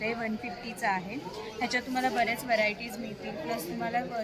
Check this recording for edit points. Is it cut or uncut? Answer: uncut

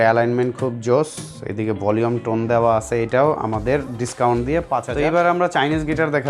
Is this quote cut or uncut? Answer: cut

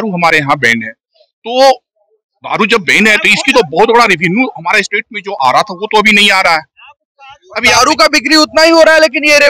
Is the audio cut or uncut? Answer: uncut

